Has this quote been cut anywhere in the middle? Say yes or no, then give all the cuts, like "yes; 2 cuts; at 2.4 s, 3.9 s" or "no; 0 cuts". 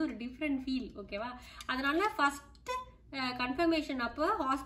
no; 0 cuts